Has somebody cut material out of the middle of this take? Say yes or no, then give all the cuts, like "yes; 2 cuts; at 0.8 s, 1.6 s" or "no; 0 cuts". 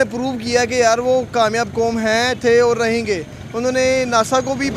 no; 0 cuts